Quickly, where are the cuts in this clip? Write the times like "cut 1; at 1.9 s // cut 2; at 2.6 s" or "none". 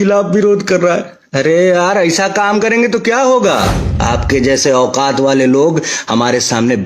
cut 1; at 3.9 s